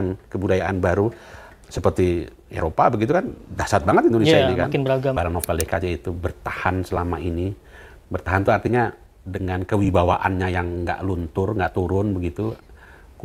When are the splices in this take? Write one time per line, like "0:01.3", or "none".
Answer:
0:05.1

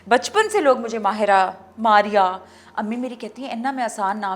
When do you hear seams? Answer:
none

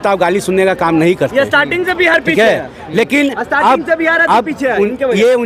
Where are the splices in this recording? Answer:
none

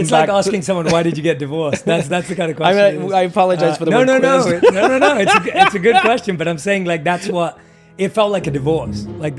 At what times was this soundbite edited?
none

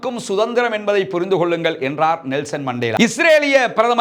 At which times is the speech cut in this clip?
0:02.9

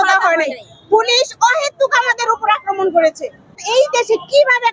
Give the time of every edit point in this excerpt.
0:03.6

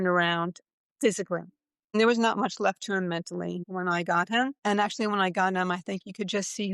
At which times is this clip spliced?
0:01.9
0:03.6
0:04.6

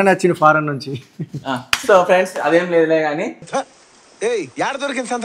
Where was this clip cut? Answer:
none

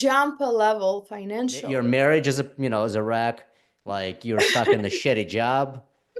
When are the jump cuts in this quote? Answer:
0:01.7

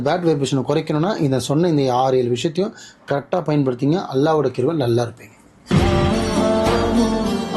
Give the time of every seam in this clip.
0:05.6

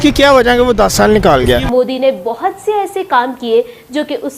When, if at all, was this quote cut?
0:01.6

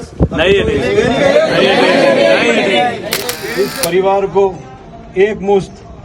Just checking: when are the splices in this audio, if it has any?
0:03.4

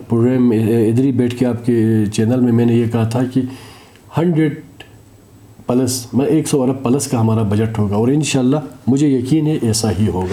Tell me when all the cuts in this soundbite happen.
none

